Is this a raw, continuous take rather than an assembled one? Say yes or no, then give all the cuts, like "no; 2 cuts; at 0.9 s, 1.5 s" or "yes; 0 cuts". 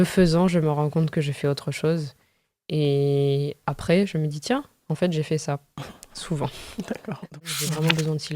no; 1 cut; at 7.2 s